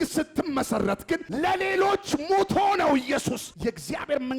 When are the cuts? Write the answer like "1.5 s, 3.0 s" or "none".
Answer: 1.3 s, 3.5 s